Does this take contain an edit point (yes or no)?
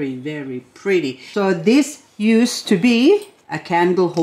yes